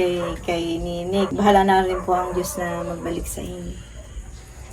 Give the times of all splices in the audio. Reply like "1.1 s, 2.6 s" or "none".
1.3 s